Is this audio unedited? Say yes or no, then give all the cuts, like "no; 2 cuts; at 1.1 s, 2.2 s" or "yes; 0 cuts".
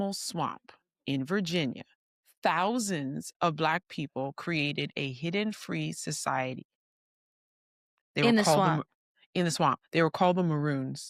yes; 0 cuts